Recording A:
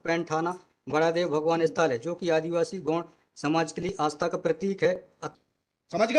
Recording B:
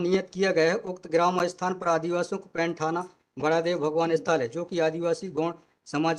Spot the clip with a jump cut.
A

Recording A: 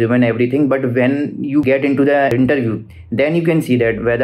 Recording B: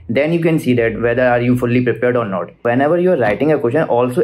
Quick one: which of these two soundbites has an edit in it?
B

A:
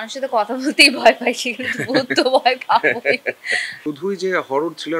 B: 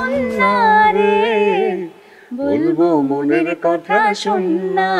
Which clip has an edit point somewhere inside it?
A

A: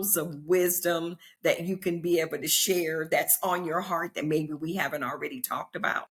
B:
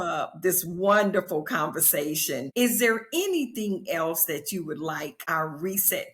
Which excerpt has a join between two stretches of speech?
B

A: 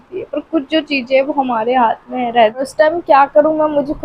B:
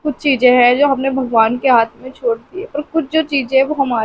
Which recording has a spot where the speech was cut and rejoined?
A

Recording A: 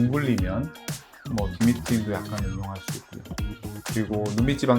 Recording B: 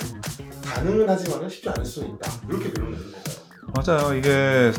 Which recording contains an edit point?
A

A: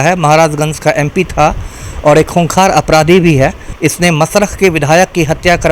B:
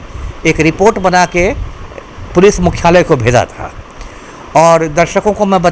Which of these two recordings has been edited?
A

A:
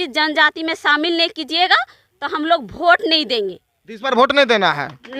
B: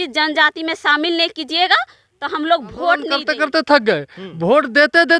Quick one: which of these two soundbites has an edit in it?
B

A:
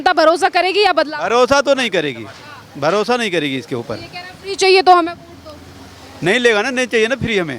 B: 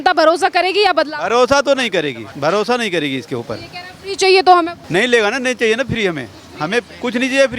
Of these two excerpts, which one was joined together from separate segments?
B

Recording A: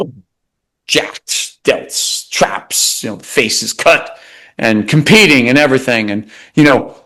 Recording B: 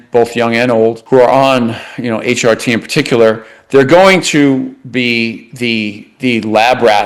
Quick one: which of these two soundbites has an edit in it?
B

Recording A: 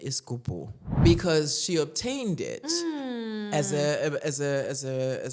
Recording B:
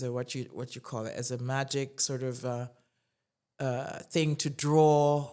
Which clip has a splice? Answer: A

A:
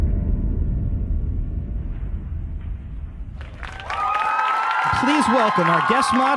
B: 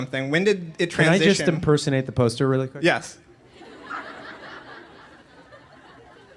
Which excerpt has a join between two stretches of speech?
B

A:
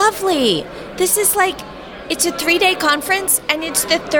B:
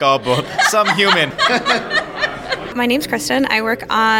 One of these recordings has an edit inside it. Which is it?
B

